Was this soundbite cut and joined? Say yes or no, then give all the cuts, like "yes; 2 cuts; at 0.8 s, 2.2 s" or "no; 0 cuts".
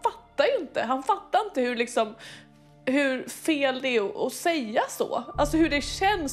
no; 0 cuts